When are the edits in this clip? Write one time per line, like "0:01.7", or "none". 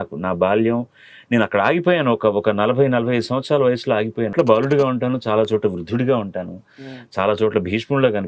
0:04.3